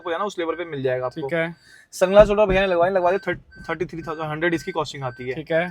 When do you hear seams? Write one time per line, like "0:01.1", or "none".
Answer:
none